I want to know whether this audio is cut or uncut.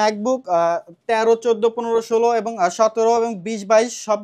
uncut